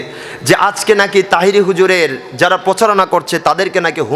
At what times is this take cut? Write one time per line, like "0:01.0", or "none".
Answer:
none